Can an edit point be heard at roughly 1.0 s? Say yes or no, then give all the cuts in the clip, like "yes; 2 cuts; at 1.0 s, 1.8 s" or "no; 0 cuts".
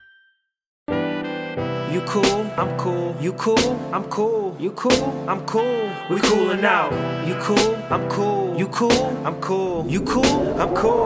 yes; 1 cut; at 1.0 s